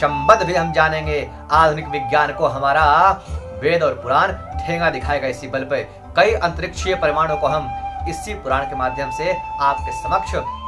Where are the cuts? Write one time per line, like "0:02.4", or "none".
none